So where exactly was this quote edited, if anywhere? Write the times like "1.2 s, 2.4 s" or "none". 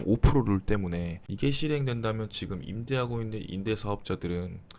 1.2 s